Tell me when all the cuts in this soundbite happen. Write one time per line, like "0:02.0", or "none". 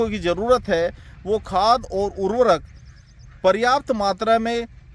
none